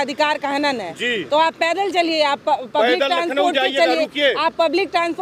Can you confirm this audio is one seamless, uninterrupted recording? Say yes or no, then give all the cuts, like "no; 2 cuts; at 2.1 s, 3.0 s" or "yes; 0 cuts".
yes; 0 cuts